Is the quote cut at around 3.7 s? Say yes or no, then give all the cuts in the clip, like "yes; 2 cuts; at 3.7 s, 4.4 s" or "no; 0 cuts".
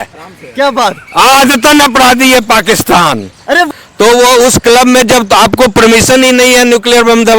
yes; 1 cut; at 3.7 s